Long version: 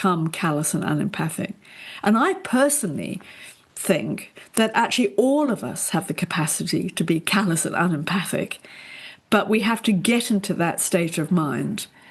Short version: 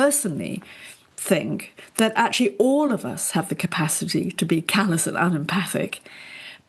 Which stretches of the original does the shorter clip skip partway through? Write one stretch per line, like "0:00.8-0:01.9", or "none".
none